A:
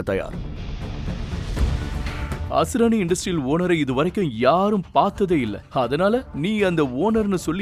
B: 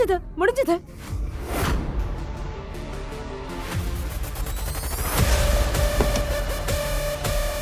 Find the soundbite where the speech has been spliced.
A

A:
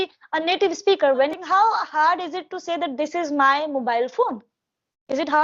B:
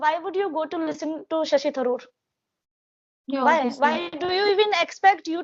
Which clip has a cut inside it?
A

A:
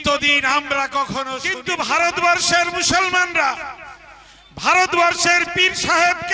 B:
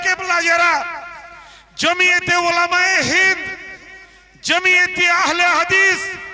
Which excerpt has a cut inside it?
A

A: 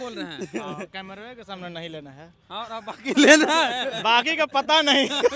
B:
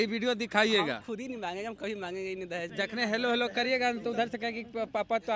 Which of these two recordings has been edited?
B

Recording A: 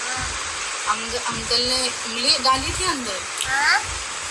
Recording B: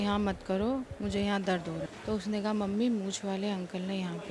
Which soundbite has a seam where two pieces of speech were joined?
B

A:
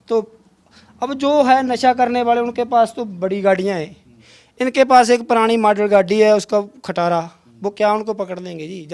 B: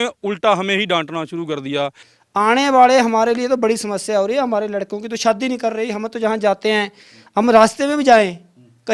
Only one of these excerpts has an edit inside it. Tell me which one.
B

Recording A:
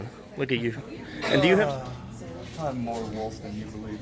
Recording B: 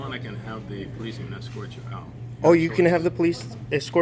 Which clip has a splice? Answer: A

